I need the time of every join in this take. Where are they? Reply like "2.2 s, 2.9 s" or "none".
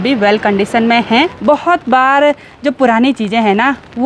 1.4 s